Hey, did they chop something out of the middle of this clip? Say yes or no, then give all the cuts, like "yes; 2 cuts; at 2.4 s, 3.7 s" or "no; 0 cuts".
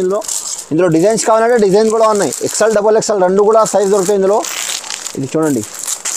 no; 0 cuts